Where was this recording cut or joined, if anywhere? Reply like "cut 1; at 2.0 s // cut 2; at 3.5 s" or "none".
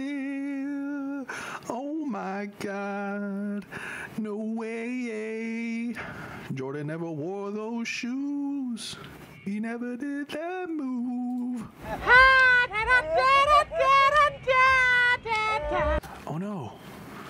cut 1; at 16.0 s